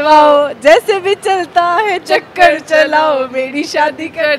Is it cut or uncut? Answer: uncut